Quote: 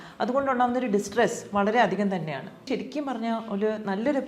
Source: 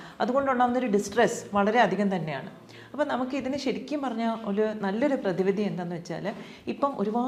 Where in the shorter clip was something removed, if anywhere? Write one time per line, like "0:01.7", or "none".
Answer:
0:02.6